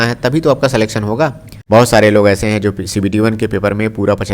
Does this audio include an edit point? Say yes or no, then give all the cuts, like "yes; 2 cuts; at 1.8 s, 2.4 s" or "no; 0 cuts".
yes; 1 cut; at 1.5 s